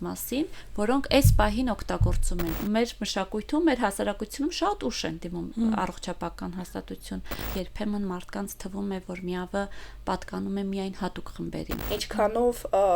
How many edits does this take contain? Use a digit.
3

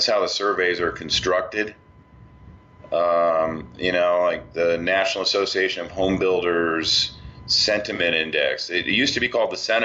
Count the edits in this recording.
1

